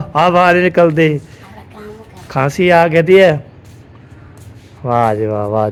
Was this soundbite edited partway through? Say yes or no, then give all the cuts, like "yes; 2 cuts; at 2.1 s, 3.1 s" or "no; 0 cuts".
no; 0 cuts